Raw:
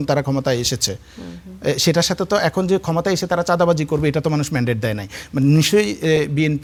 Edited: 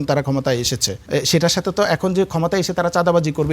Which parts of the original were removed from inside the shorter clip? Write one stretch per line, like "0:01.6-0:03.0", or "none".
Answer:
0:00.9-0:01.5